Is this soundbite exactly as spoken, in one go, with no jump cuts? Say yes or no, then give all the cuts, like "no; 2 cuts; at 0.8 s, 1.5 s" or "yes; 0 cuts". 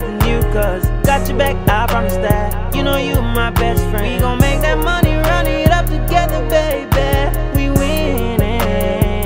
yes; 0 cuts